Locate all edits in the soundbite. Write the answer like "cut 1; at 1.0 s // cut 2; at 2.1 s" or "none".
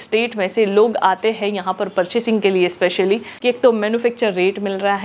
cut 1; at 3.3 s

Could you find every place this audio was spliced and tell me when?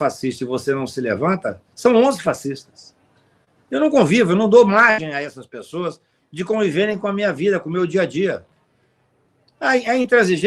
none

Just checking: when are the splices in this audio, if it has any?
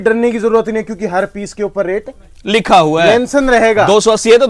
none

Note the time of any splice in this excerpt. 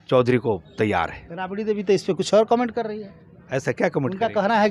none

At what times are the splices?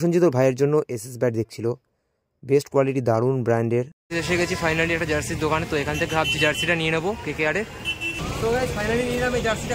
cut 1; at 4.0 s // cut 2; at 8.2 s

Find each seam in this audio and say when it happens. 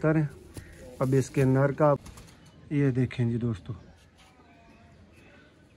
cut 1; at 2.0 s

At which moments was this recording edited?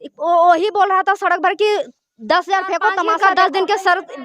cut 1; at 3.1 s

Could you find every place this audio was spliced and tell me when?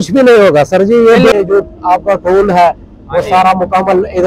cut 1; at 1.3 s

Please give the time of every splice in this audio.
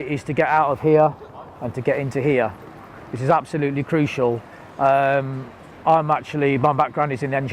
none

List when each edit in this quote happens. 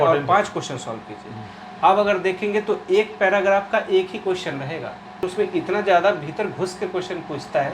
cut 1; at 5.2 s

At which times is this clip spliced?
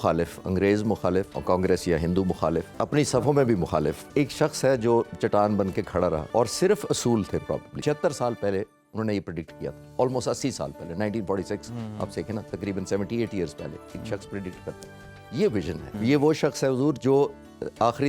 cut 1; at 1.3 s // cut 2; at 2.8 s // cut 3; at 4.1 s // cut 4; at 6.2 s // cut 5; at 7.7 s // cut 6; at 16.0 s

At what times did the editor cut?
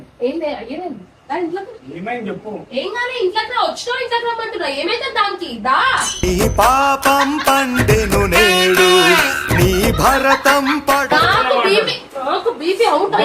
cut 1; at 11.0 s

